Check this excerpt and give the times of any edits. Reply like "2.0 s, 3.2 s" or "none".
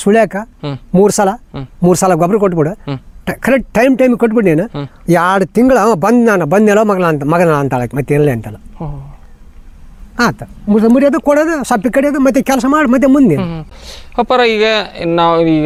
none